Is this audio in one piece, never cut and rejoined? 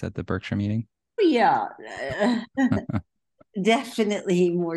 no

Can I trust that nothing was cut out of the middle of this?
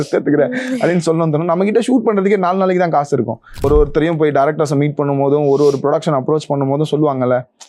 no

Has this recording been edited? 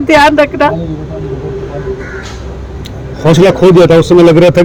no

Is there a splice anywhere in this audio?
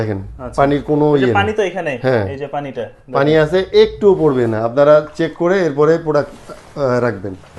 no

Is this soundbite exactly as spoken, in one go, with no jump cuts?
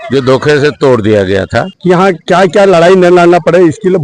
no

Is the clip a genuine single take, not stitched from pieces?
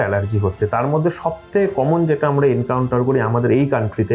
yes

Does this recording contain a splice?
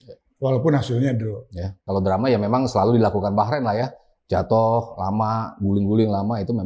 yes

